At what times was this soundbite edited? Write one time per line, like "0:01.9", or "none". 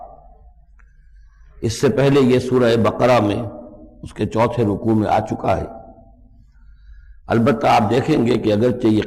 none